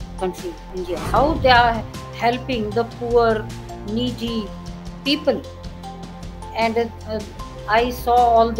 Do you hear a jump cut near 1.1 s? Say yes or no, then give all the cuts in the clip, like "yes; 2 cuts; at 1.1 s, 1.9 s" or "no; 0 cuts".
yes; 1 cut; at 1.1 s